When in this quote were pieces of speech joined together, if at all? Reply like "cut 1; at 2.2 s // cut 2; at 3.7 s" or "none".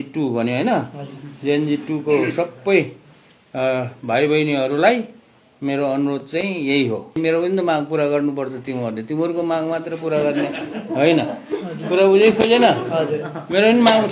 cut 1; at 7.2 s